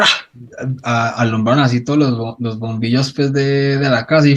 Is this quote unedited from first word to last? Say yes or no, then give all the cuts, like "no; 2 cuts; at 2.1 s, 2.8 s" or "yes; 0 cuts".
yes; 0 cuts